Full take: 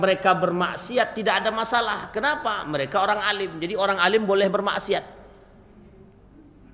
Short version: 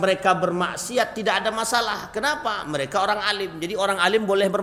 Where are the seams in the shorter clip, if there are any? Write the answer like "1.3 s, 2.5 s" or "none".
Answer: none